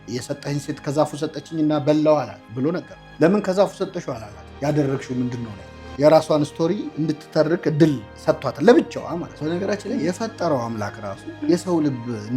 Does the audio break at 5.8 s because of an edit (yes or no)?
no